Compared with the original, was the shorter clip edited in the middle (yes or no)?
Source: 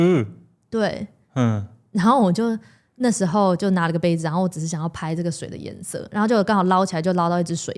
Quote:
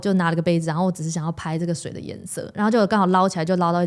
no